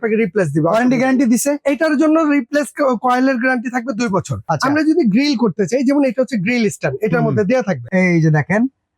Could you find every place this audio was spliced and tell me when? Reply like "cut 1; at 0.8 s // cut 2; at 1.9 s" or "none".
cut 1; at 4.4 s // cut 2; at 7.8 s

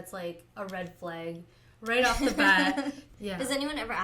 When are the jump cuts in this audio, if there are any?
cut 1; at 3.1 s

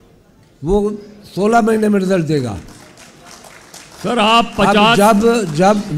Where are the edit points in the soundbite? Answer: none

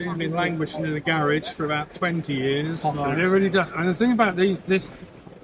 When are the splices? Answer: cut 1; at 2.8 s

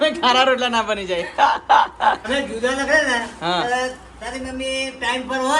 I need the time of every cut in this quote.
cut 1; at 2.2 s

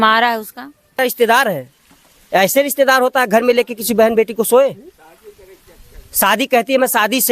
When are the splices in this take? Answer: cut 1; at 1.0 s

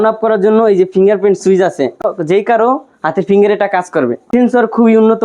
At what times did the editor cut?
cut 1; at 2.0 s // cut 2; at 4.3 s

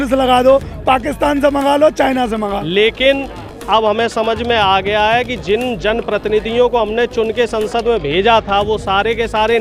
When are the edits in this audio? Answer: cut 1; at 2.5 s

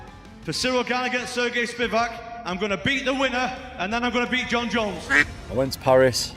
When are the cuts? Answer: cut 1; at 5.3 s

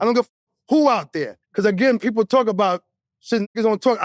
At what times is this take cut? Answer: cut 1; at 1.4 s

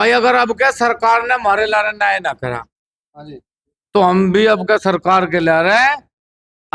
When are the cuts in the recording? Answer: none

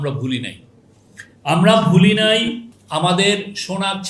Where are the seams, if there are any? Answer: cut 1; at 2.7 s

